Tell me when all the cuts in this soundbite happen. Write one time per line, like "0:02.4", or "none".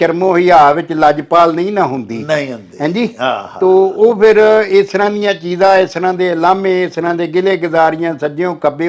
none